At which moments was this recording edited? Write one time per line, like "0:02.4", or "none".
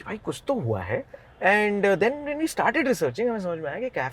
0:01.2

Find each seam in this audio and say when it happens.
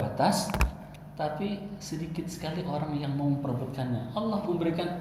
none

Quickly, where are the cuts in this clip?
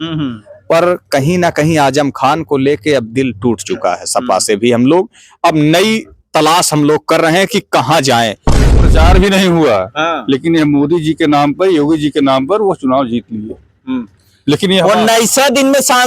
0:08.8

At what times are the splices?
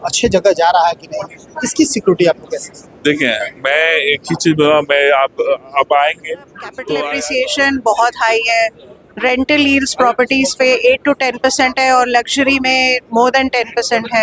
0:07.0

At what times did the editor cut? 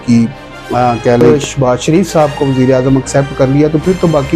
0:01.2

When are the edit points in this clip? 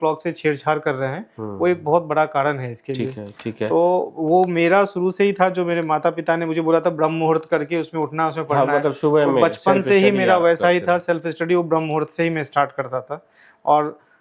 none

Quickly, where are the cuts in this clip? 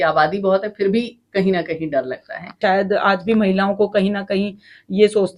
0:02.6

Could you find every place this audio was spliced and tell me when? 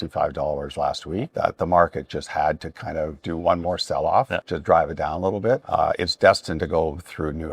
0:01.3
0:04.4
0:05.6

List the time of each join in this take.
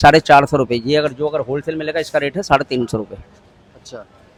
none

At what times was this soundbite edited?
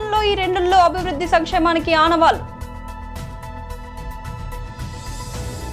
0:03.4

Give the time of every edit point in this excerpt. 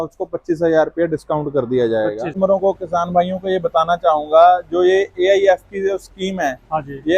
0:02.3

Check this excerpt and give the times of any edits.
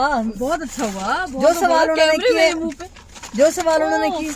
none

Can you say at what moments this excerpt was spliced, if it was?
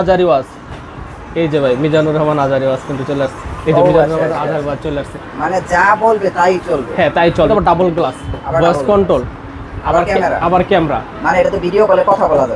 0:07.5

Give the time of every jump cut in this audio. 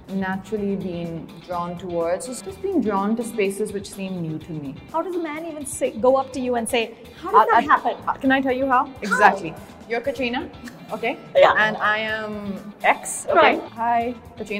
0:02.3
0:04.9
0:07.0
0:13.7

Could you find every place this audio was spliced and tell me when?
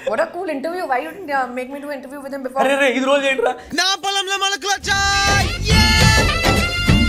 none

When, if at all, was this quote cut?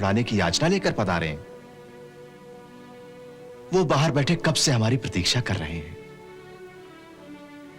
none

